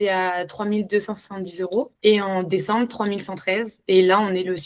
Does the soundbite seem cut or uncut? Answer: uncut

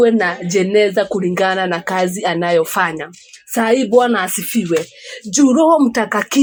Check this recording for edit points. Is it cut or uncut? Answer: uncut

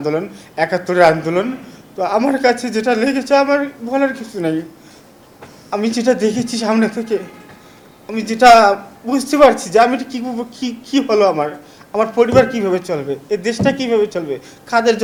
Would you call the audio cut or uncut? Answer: uncut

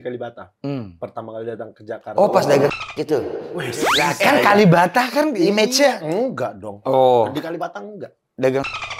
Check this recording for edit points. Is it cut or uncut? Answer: cut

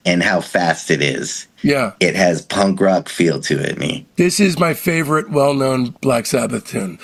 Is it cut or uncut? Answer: uncut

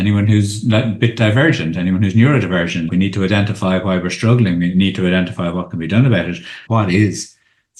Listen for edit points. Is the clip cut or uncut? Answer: cut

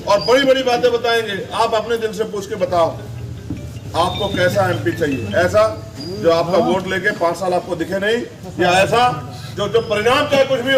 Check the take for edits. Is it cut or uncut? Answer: uncut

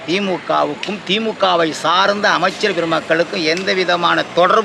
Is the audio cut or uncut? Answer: uncut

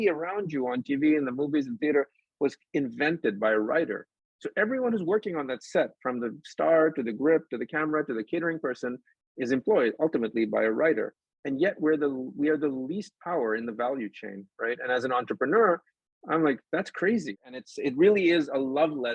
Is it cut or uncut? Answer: cut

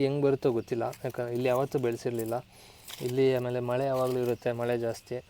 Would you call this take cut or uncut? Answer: uncut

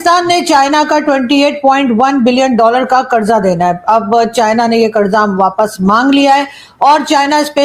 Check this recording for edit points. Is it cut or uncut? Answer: uncut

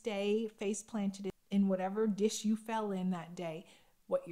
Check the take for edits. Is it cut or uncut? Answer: cut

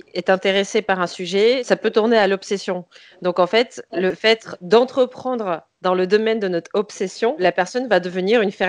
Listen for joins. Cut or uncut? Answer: cut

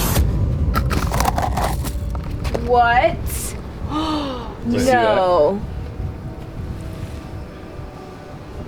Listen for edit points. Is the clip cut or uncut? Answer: uncut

